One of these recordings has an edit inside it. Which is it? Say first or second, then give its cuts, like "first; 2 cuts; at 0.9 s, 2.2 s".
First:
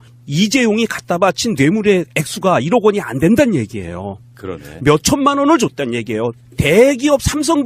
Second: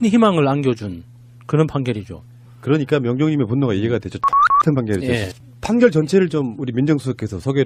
first; 1 cut; at 6.2 s